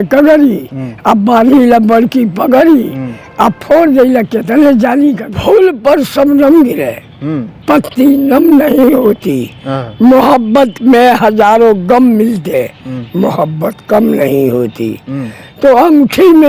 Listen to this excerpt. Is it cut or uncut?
cut